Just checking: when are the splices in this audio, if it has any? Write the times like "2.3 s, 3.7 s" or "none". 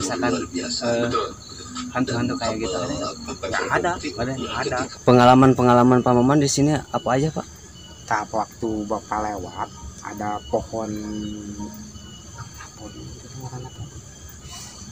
4.9 s